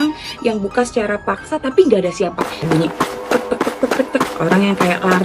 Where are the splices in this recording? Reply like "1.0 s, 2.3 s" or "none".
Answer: 2.4 s